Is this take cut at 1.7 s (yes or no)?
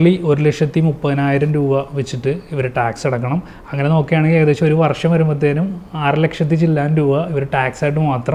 no